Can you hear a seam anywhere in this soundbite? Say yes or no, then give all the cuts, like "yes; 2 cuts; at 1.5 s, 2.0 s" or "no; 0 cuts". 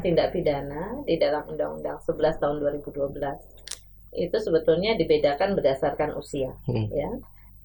no; 0 cuts